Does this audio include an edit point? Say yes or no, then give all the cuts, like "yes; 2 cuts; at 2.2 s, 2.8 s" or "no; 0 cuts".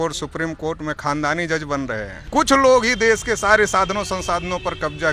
yes; 1 cut; at 2.1 s